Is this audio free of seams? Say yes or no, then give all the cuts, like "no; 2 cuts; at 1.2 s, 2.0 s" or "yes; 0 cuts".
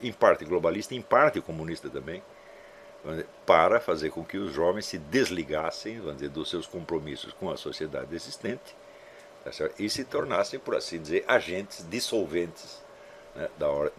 yes; 0 cuts